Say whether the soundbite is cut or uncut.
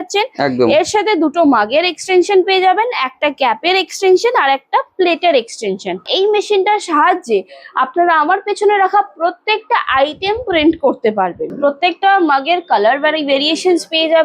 cut